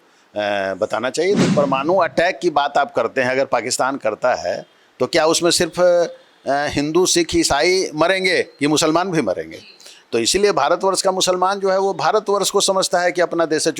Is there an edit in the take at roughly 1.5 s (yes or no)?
yes